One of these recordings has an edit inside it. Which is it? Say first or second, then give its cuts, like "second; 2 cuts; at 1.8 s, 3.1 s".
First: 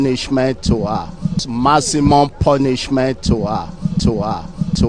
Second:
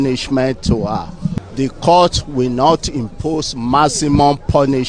first; 2 cuts; at 1.4 s, 4.0 s